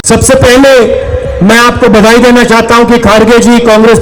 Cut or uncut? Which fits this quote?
uncut